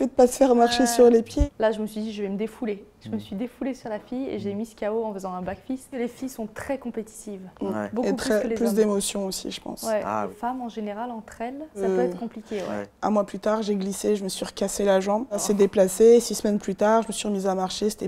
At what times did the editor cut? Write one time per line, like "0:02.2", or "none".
0:01.3
0:06.0
0:10.3
0:11.8
0:12.9
0:15.4

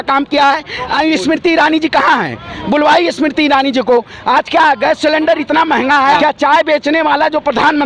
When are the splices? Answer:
0:00.9
0:06.2

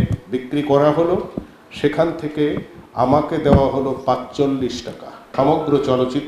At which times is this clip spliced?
0:05.3

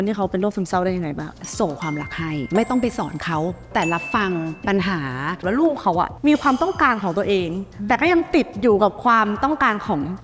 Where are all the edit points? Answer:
0:01.4
0:02.4
0:03.7
0:05.4

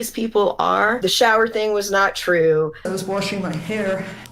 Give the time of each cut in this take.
0:01.0
0:02.9

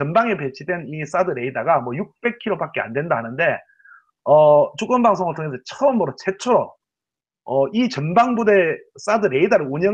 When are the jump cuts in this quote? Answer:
0:07.7

